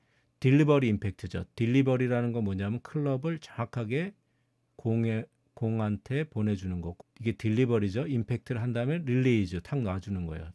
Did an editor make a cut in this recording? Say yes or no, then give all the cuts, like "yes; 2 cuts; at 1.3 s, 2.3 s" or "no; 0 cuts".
yes; 1 cut; at 6.9 s